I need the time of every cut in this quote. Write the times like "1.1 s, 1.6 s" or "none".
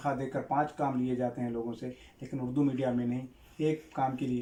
none